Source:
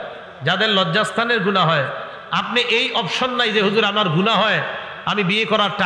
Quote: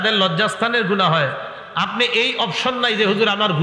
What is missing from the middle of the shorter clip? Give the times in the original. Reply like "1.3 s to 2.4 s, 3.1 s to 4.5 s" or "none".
none